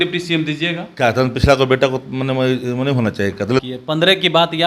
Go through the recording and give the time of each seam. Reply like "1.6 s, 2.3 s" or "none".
3.6 s